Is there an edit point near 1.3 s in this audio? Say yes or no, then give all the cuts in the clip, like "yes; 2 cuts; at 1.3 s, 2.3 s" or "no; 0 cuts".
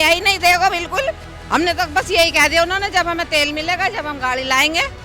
yes; 1 cut; at 1.3 s